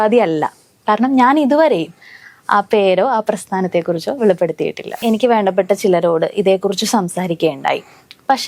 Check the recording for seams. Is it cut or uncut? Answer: cut